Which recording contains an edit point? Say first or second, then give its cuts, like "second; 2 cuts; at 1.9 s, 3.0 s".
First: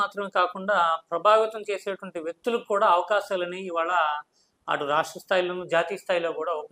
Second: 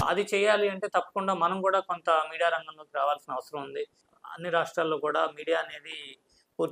second; 1 cut; at 4.0 s